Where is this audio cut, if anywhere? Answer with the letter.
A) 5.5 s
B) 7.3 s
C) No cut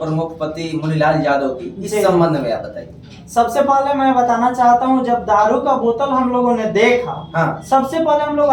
C